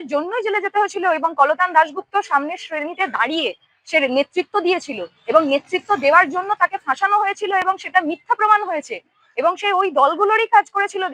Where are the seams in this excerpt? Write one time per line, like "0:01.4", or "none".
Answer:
none